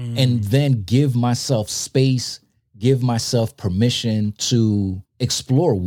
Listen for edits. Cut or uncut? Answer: uncut